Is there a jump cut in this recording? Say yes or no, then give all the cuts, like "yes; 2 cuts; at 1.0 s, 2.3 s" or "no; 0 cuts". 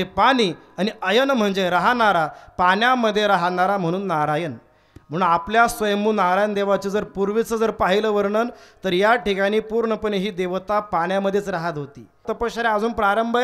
yes; 1 cut; at 12.3 s